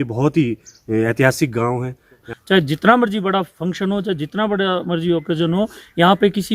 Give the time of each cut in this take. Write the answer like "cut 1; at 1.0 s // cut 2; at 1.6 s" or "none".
cut 1; at 2.2 s